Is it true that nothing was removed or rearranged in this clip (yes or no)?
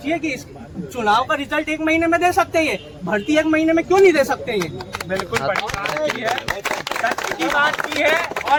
yes